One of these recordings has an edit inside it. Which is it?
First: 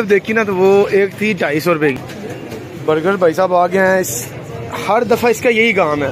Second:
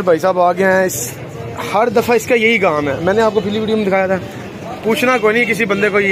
first; 1 cut; at 2.0 s

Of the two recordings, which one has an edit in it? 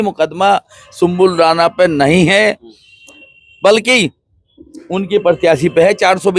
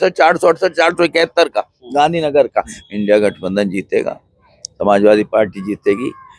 second; 1 cut; at 2.8 s

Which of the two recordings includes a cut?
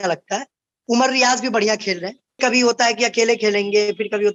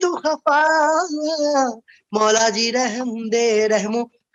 first; 1 cut; at 2.4 s

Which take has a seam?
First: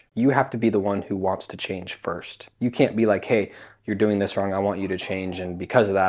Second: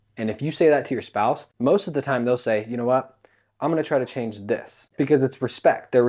second; 2 cuts; at 1.5 s, 4.8 s

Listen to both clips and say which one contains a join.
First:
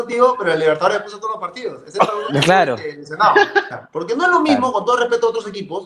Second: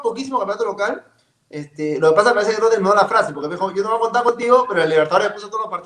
first; 1 cut; at 3.7 s

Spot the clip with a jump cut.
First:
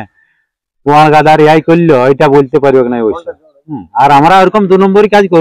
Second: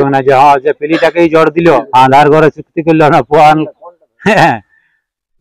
second; 1 cut; at 1.9 s

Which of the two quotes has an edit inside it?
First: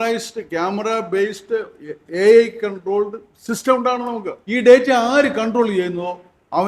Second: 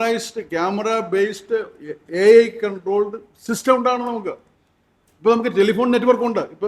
first; 1 cut; at 4.4 s

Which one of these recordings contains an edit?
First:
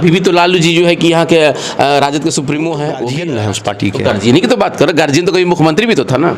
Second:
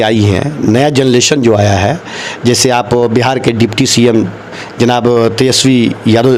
first; 1 cut; at 3.1 s

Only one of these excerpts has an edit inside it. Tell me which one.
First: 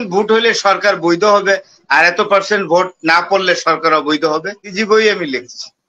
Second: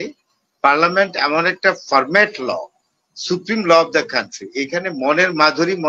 first; 1 cut; at 4.7 s

